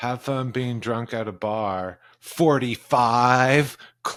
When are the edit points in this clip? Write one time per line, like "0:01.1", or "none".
none